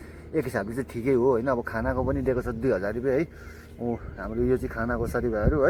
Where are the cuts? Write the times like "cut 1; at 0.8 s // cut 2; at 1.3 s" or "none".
none